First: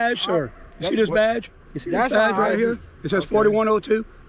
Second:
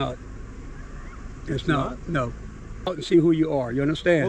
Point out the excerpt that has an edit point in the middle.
second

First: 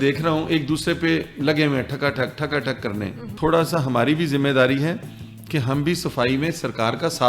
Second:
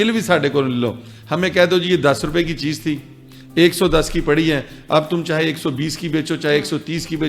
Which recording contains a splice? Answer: first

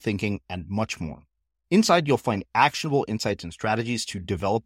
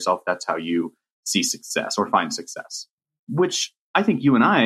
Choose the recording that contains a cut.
second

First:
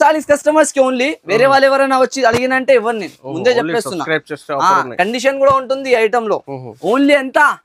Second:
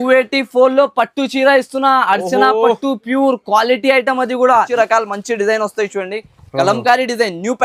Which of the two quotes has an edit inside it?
second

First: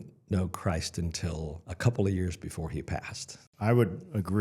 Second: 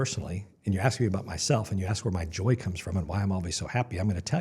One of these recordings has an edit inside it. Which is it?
first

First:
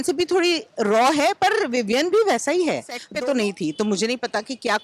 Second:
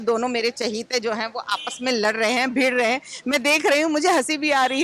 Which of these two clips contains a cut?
first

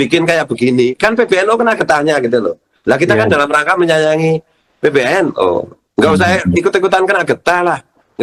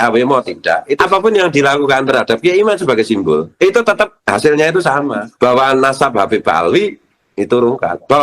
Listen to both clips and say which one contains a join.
second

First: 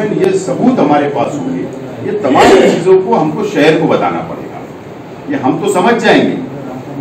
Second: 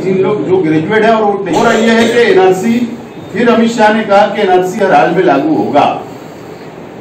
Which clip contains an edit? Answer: second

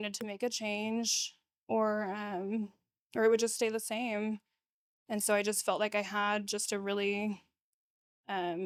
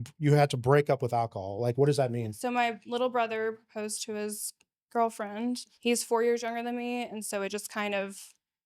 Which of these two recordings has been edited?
second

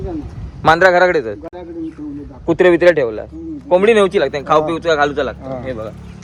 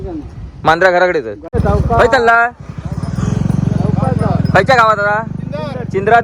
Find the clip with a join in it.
second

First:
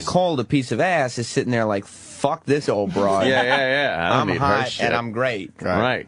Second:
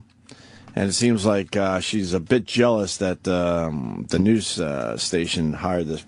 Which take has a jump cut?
second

